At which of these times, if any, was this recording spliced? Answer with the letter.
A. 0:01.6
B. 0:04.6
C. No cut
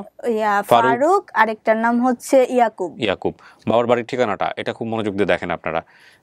C